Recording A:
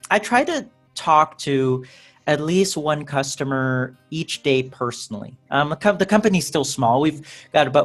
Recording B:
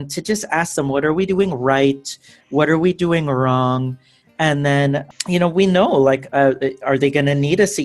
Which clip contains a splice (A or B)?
B